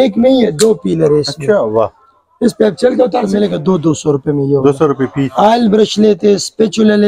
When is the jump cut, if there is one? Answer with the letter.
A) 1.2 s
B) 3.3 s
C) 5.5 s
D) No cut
B